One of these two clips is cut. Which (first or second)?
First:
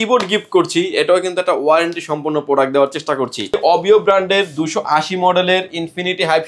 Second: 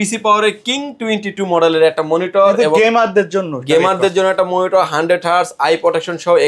first